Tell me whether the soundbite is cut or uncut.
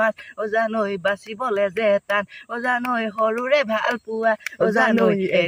uncut